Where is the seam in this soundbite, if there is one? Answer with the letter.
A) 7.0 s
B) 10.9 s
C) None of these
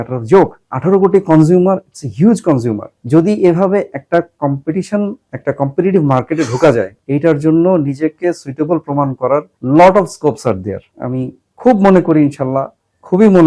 B